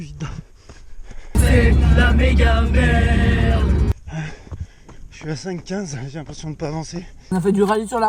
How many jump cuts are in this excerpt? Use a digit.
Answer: 2